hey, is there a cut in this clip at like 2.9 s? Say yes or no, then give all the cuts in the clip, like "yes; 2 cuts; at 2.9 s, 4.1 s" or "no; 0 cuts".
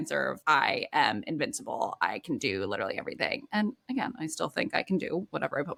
no; 0 cuts